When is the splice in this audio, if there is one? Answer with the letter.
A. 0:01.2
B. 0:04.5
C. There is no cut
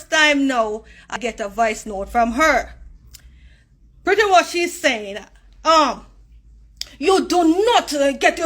A